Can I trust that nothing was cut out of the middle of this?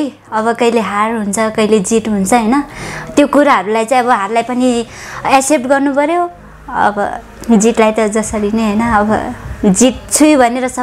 yes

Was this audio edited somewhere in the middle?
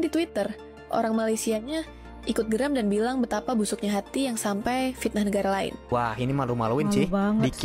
yes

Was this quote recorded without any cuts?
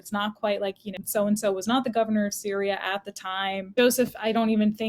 no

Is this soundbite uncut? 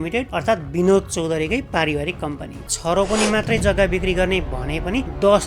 no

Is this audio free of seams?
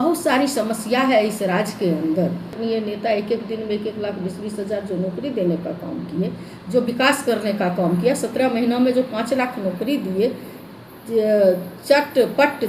no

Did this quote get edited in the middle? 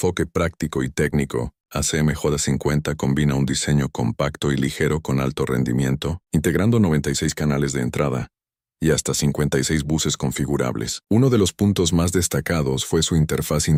no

